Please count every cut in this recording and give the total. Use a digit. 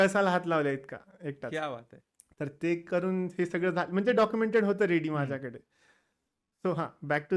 0